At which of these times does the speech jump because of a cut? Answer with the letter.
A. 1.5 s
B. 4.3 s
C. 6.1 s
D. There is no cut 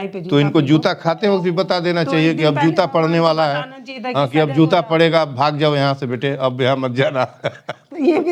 D